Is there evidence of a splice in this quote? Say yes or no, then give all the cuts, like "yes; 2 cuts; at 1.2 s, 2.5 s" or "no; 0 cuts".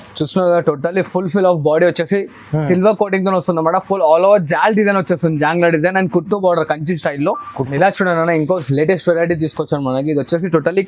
yes; 1 cut; at 7.6 s